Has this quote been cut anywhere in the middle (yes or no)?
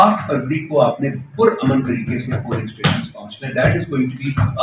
no